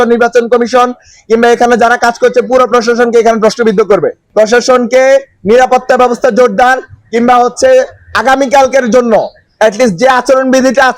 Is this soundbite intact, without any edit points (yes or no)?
no